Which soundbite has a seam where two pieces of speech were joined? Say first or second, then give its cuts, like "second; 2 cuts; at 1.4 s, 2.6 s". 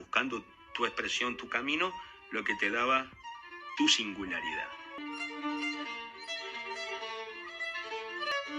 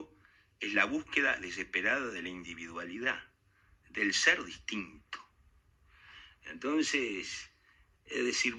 first; 1 cut; at 5.0 s